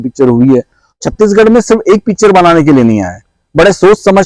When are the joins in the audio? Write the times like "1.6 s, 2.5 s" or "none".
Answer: 1.0 s